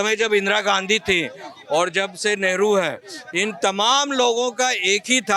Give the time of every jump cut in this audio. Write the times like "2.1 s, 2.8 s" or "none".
none